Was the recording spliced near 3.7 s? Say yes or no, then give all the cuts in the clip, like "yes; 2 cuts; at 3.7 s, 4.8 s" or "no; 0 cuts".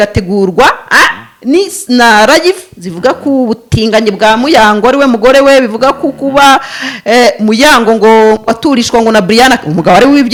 no; 0 cuts